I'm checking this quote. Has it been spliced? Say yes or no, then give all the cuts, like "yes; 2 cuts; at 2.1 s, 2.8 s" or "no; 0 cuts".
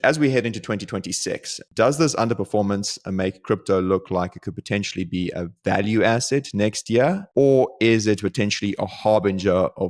no; 0 cuts